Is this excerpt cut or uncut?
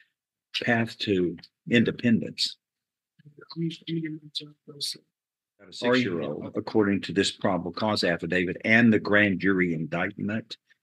cut